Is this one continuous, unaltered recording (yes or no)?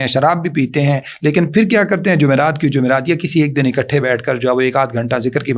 yes